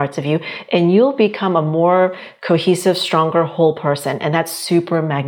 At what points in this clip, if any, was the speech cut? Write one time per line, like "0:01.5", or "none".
none